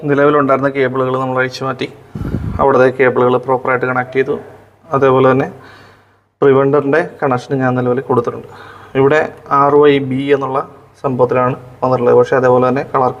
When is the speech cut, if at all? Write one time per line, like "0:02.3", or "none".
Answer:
none